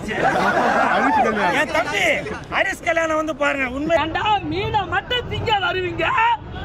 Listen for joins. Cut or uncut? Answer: cut